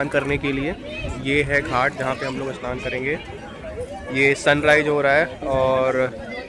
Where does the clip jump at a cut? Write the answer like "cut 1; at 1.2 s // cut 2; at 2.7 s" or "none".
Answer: none